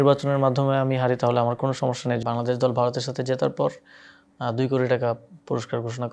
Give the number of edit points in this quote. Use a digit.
1